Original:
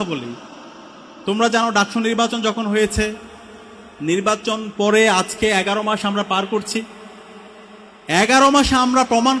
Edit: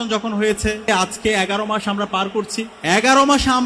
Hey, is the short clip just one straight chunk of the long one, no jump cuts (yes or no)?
no